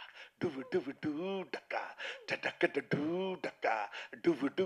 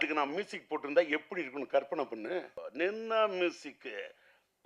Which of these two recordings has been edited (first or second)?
second